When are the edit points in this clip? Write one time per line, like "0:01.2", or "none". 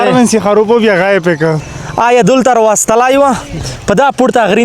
0:01.6